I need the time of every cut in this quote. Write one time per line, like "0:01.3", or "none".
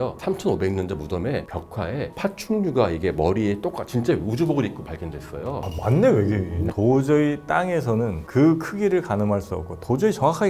0:06.7